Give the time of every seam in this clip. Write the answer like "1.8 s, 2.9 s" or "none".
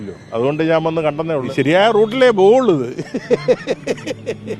1.5 s